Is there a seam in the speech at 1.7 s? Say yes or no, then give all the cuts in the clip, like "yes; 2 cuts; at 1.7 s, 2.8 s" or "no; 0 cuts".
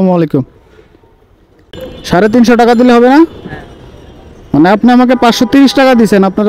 yes; 1 cut; at 1.7 s